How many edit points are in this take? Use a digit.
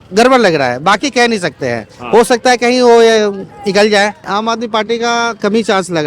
1